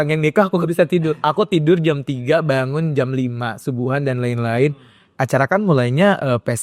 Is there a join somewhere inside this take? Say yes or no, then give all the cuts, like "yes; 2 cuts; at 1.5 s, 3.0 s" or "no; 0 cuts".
no; 0 cuts